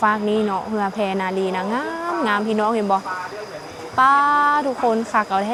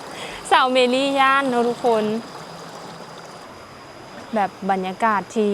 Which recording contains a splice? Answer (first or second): second